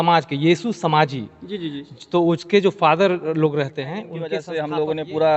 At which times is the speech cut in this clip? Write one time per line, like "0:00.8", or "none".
0:04.1